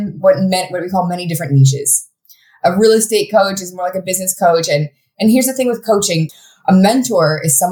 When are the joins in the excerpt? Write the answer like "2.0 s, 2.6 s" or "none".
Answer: 6.4 s